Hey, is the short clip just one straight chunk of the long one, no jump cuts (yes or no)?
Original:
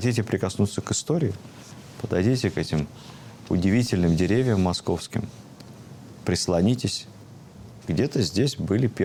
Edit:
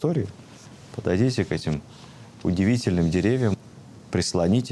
no